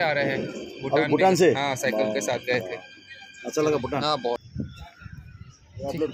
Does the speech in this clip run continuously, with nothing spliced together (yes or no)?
no